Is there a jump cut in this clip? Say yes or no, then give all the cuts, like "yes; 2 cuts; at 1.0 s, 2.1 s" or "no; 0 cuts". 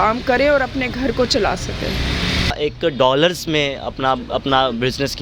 yes; 1 cut; at 2.5 s